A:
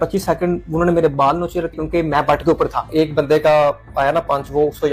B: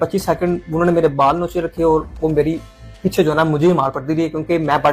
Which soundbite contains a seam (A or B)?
A